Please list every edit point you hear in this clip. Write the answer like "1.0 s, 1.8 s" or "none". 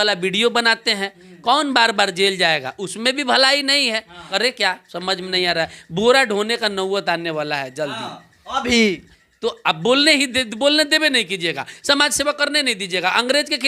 none